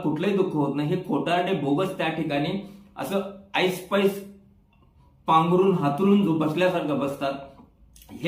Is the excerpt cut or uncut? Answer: uncut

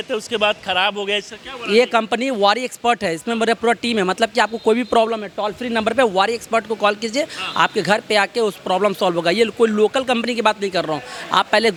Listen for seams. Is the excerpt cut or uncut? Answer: uncut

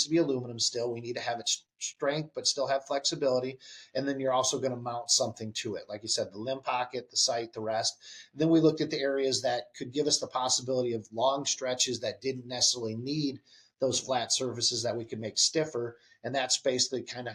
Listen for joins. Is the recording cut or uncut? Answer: uncut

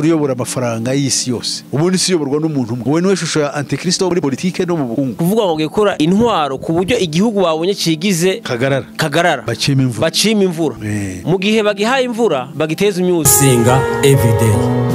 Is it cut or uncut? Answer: cut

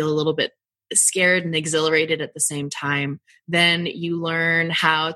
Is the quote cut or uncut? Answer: cut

